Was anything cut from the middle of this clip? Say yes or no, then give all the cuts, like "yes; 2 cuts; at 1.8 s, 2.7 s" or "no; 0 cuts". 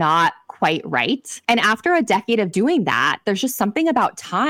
yes; 2 cuts; at 1.3 s, 2.5 s